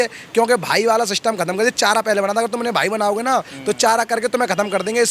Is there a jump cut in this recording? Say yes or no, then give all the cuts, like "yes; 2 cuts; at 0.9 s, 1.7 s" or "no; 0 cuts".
no; 0 cuts